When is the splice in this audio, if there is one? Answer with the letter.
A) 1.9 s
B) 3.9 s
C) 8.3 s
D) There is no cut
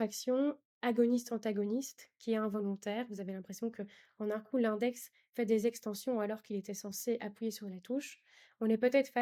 D